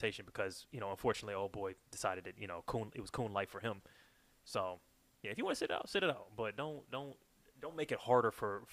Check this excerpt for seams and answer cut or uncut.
uncut